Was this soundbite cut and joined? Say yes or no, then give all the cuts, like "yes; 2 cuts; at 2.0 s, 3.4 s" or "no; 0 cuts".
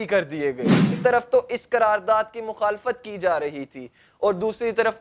yes; 1 cut; at 1.0 s